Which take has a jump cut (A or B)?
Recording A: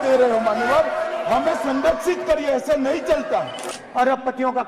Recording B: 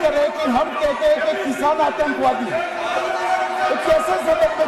A